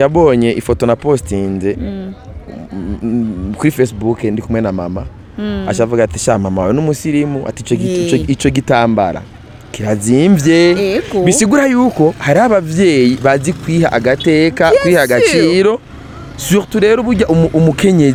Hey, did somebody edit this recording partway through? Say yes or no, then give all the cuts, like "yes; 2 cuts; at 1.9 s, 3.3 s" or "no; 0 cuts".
no; 0 cuts